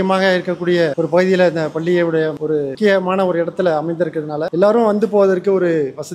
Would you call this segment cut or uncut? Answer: uncut